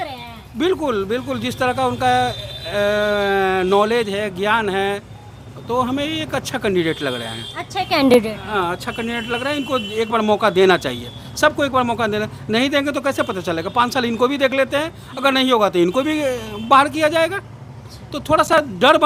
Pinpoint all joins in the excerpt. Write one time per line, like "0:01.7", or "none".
none

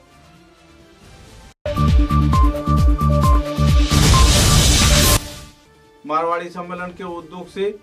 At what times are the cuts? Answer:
0:05.3

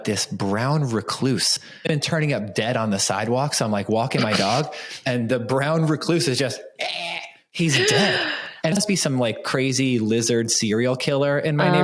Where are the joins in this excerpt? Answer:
0:01.8
0:08.7

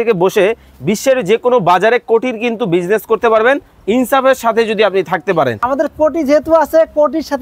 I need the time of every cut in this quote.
0:05.6

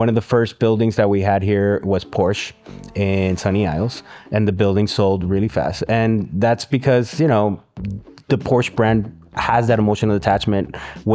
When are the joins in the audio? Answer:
none

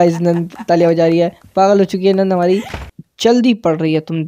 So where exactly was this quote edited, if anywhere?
0:02.9

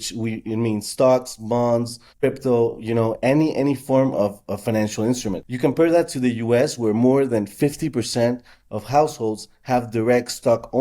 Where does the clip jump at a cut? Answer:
0:02.0
0:05.5

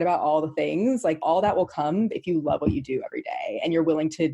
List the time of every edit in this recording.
0:01.2

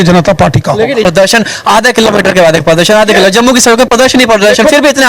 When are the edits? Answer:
0:01.0

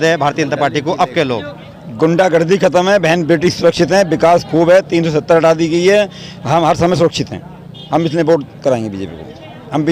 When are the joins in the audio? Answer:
none

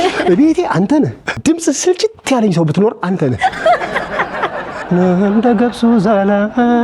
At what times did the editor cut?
0:01.4
0:04.7

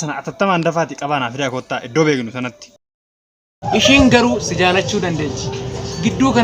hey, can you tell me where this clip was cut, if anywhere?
0:03.0

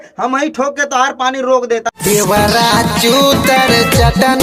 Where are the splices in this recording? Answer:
0:01.9

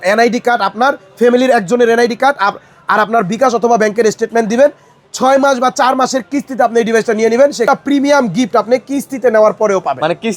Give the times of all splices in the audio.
0:07.7

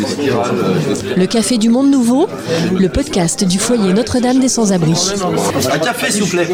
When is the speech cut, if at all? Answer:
none

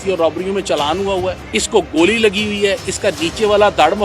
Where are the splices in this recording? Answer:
0:01.4

